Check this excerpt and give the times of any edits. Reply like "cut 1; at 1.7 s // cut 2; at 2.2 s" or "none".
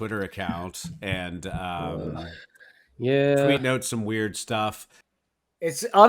cut 1; at 4.9 s